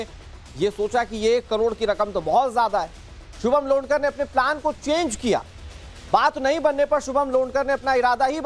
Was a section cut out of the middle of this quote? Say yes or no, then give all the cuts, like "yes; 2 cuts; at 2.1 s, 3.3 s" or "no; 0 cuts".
no; 0 cuts